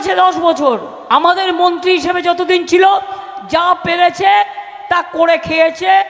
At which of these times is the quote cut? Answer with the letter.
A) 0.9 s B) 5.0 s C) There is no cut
A